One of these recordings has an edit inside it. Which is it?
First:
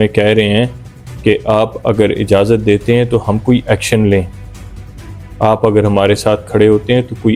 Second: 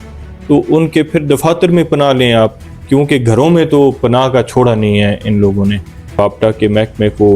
second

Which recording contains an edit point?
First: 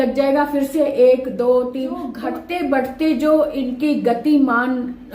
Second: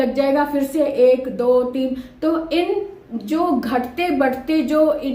first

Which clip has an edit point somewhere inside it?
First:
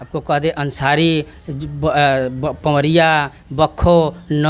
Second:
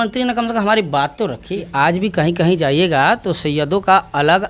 second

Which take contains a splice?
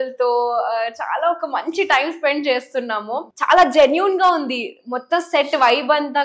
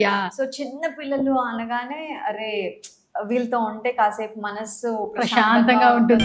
first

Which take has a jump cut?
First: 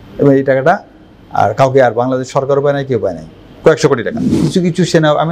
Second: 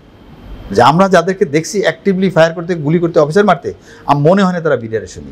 first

